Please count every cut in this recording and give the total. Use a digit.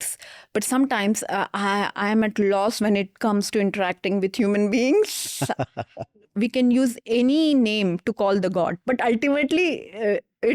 1